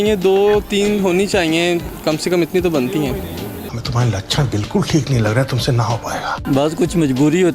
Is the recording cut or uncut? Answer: cut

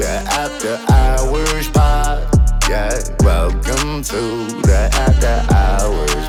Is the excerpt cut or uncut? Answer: uncut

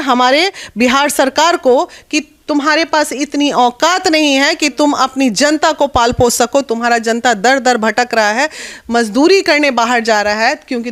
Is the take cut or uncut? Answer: uncut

